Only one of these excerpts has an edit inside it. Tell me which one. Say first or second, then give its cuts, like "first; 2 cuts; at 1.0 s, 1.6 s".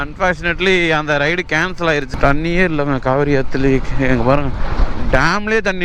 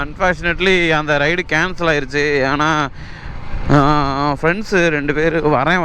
first; 1 cut; at 2.1 s